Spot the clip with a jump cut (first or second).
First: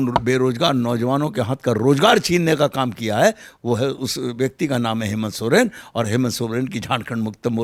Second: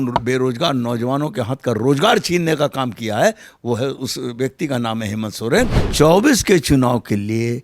second